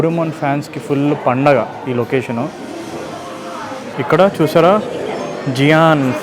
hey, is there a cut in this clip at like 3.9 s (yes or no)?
yes